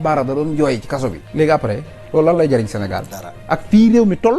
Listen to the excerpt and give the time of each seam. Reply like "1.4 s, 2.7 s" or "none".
none